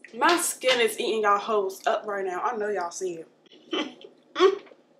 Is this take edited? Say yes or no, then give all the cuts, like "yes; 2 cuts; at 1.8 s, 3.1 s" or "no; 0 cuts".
no; 0 cuts